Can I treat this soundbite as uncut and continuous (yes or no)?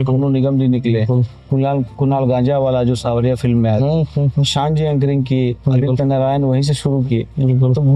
yes